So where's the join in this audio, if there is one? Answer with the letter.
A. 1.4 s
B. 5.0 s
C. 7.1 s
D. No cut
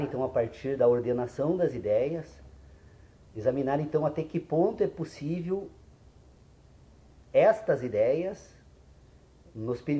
D